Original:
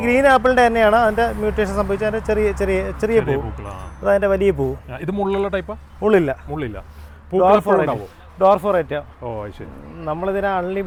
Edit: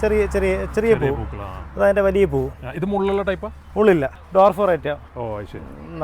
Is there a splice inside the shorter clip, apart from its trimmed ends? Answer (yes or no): yes